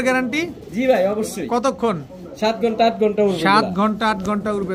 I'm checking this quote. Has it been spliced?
no; 0 cuts

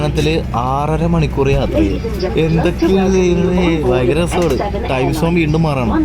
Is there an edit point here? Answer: yes; 1 cut; at 2.3 s

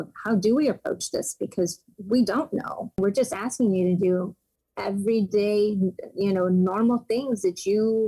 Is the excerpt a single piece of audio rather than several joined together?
no; 1 cut; at 3.0 s

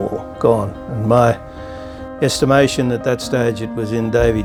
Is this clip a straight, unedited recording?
yes; 0 cuts

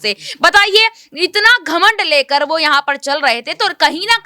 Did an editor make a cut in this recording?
no; 0 cuts

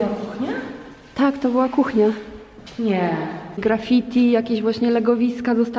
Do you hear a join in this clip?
yes; 1 cut; at 3.6 s

